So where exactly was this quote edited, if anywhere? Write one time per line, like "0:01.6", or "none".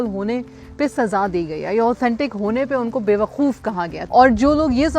0:04.0